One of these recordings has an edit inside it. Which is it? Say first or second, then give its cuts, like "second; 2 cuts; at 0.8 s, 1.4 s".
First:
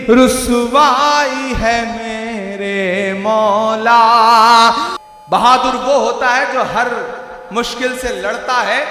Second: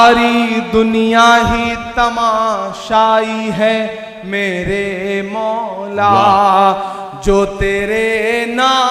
first; 1 cut; at 4.9 s